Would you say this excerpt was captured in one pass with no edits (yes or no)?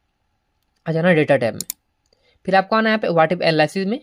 yes